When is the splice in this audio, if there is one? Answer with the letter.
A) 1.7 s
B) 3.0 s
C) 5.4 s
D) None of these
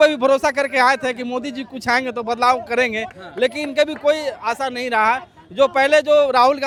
D